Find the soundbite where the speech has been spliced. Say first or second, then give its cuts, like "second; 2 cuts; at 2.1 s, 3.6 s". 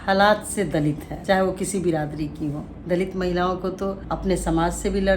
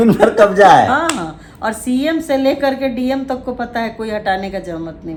first; 3 cuts; at 1.1 s, 2.7 s, 4.1 s